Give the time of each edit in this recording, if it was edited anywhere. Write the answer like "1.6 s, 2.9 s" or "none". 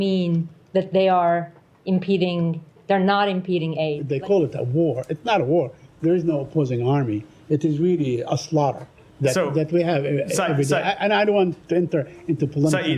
4.0 s